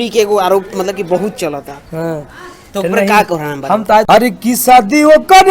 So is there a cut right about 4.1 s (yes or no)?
yes